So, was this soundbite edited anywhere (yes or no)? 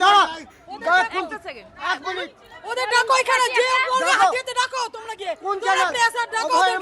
no